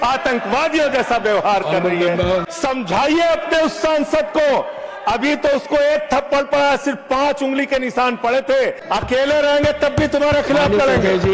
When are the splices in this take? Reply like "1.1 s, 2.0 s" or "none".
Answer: 2.4 s, 8.8 s

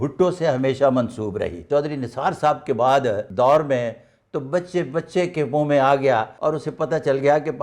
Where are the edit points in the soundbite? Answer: 1.6 s, 3.3 s, 6.3 s

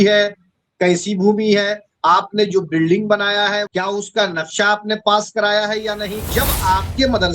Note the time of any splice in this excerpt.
3.6 s, 6.3 s

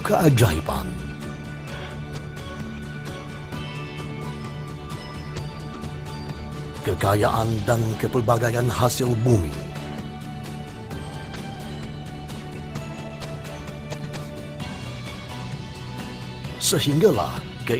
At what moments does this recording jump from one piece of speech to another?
none

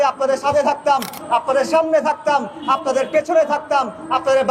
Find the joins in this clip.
none

